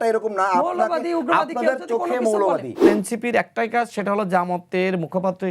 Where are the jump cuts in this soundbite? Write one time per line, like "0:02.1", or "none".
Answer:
0:02.8